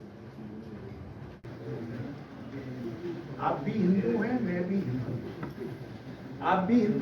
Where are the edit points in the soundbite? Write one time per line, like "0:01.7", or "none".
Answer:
0:01.5